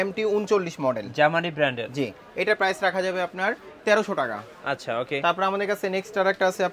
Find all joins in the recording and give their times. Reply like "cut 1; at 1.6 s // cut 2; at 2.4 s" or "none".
none